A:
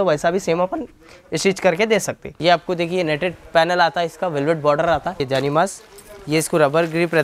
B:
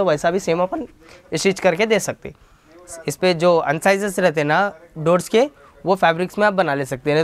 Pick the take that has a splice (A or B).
A